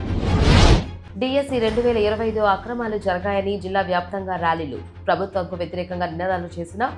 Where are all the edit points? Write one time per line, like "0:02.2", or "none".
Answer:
0:01.0